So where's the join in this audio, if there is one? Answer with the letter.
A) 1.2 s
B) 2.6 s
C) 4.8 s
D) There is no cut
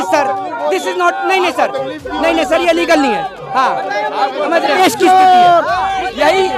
C